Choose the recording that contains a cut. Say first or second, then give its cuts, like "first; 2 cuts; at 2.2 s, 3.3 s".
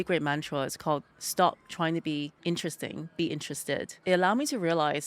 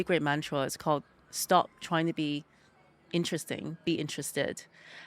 first; 3 cuts; at 1.2 s, 2.3 s, 3.9 s